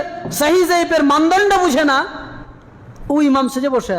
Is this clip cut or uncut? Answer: uncut